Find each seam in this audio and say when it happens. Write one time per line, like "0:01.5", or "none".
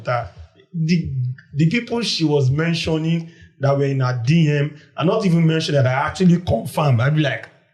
none